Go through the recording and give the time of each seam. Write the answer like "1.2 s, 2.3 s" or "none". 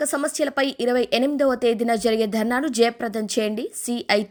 none